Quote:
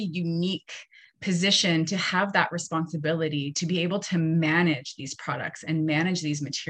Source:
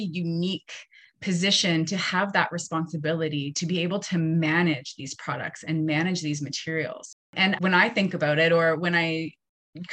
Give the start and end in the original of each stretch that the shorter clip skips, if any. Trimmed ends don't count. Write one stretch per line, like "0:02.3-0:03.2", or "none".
none